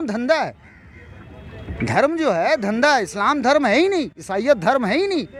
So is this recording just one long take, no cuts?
yes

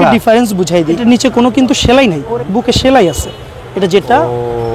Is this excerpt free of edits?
no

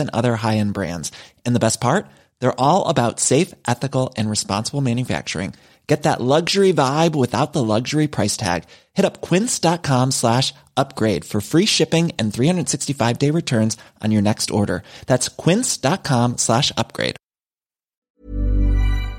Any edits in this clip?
yes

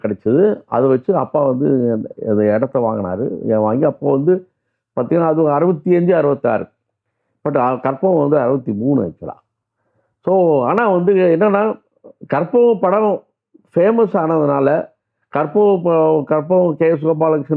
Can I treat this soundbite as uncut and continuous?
yes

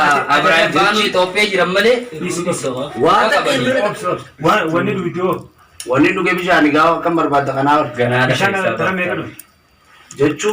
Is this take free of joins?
no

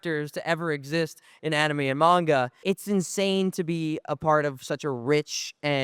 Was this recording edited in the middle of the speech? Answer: yes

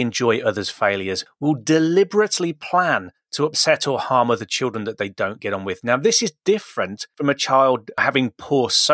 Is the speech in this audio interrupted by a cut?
yes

